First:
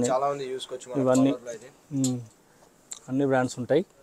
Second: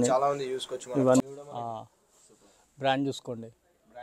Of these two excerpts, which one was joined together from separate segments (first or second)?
second